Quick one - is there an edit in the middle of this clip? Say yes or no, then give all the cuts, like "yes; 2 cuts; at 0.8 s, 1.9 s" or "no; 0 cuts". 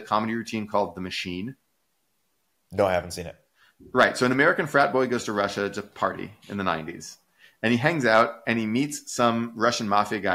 no; 0 cuts